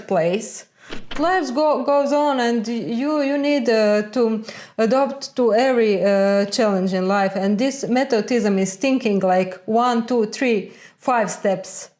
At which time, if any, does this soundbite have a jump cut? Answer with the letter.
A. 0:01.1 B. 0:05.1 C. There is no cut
A